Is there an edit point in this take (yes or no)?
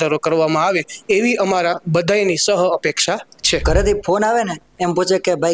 yes